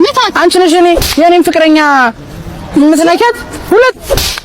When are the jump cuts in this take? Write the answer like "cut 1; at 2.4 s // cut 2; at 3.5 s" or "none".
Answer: cut 1; at 3.5 s